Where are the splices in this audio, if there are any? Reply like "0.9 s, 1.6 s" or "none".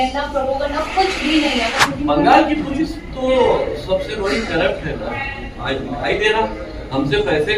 1.8 s